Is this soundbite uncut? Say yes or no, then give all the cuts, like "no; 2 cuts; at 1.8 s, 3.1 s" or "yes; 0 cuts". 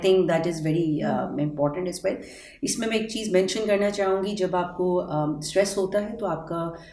yes; 0 cuts